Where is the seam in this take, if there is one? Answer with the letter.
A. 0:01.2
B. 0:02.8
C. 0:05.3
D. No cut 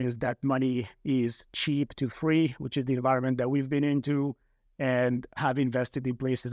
C